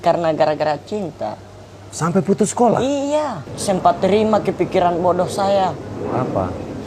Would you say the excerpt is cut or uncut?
cut